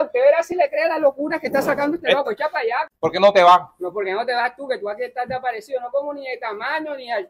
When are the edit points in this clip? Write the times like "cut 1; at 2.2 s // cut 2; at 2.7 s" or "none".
none